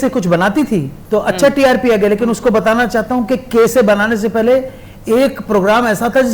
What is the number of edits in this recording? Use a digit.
1